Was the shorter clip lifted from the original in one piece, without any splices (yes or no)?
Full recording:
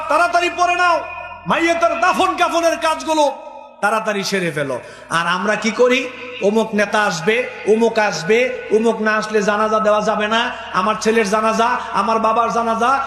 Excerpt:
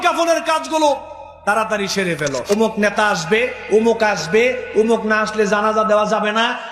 no